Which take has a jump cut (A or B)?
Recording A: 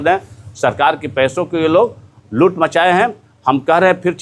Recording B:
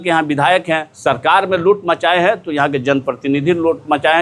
B